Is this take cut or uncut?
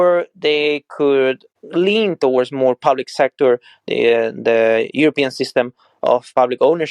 cut